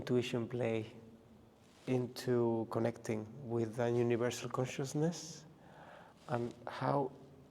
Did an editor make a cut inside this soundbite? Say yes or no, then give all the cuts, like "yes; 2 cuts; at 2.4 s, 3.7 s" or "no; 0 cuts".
no; 0 cuts